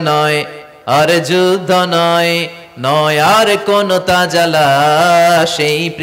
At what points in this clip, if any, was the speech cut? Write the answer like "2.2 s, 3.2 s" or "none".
none